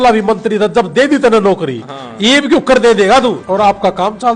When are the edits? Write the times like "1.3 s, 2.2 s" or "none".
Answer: 3.4 s